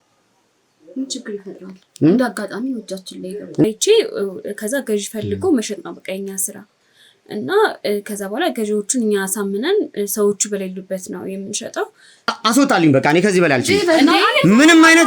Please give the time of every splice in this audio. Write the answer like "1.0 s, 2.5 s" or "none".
3.6 s, 12.3 s